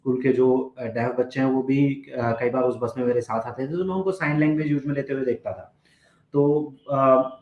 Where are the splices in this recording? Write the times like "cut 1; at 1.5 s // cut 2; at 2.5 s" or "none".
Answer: none